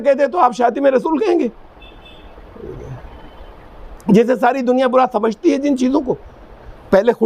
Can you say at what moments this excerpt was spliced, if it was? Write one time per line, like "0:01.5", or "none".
none